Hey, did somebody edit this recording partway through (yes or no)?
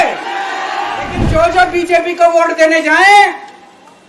yes